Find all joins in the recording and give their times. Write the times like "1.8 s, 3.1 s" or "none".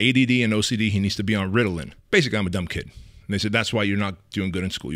1.9 s